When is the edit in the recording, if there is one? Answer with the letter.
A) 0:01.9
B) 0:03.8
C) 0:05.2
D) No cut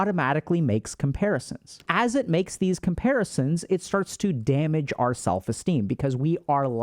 A